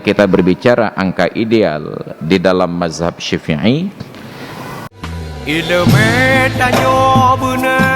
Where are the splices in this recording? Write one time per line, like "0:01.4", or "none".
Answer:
0:04.8